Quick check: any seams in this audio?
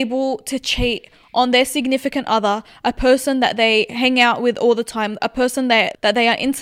no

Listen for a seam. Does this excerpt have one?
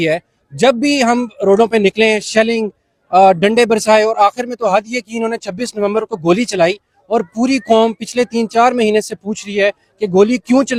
no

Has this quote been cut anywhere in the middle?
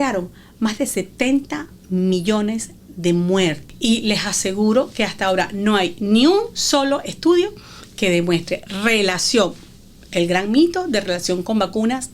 yes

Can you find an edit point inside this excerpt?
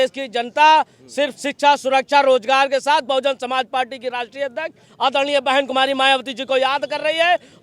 no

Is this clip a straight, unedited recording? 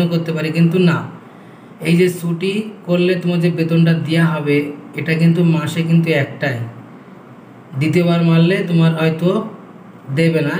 yes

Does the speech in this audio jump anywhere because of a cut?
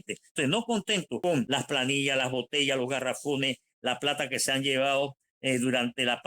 yes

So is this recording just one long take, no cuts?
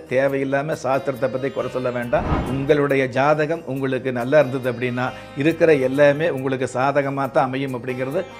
no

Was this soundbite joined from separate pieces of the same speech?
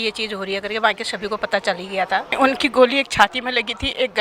yes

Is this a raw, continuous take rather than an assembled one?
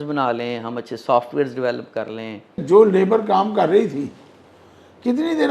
no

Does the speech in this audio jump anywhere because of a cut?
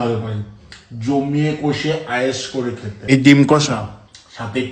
yes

